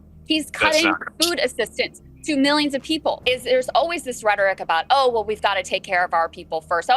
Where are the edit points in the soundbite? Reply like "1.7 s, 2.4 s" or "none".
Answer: 3.2 s